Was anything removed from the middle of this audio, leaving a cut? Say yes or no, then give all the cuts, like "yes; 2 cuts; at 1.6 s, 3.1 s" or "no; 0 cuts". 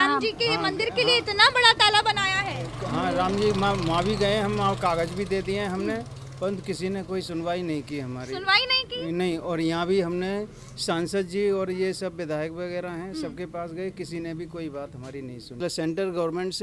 yes; 1 cut; at 15.6 s